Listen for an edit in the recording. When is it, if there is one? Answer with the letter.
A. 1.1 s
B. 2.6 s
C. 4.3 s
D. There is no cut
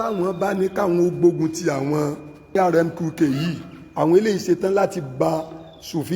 B